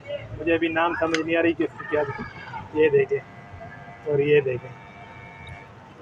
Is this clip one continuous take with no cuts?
yes; 0 cuts

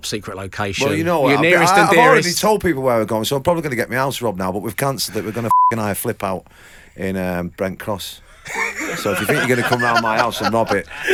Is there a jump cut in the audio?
no; 0 cuts

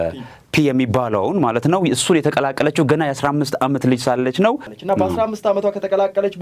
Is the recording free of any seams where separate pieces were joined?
no; 1 cut; at 4.7 s

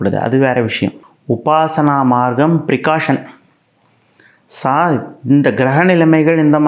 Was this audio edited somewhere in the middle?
yes; 1 cut; at 1.1 s

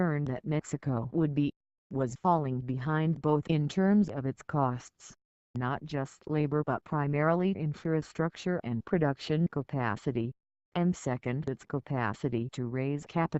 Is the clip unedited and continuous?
no; 1 cut; at 2.5 s

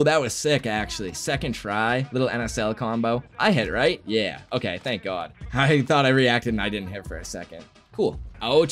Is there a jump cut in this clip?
no; 0 cuts

